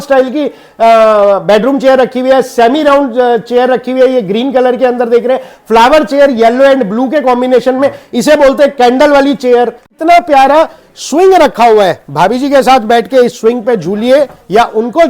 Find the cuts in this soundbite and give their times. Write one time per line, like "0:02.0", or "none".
0:09.9